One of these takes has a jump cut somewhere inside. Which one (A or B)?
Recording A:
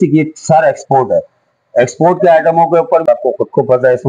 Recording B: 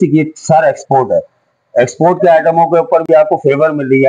A